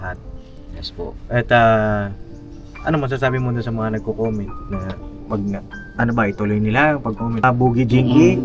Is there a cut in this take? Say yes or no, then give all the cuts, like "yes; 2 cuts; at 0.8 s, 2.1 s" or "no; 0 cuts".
yes; 1 cut; at 7.4 s